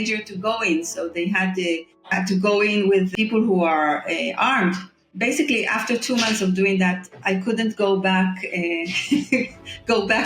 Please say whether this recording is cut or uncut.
cut